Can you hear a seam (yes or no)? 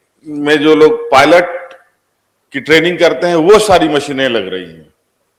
no